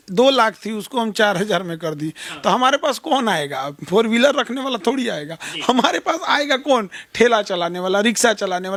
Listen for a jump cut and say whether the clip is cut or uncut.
uncut